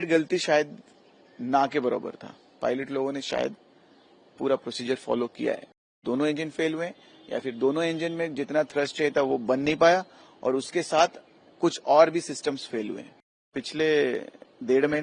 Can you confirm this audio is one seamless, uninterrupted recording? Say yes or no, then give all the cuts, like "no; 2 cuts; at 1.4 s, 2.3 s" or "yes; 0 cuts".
no; 2 cuts; at 5.9 s, 13.5 s